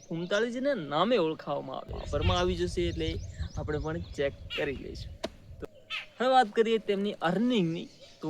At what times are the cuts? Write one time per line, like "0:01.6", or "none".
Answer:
0:02.0